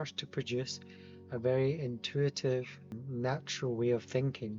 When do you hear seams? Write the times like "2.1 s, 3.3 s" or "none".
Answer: 3.0 s